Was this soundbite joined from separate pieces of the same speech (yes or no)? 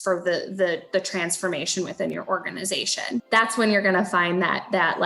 yes